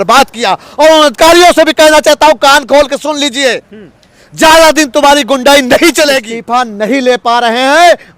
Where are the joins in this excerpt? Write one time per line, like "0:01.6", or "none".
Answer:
0:06.3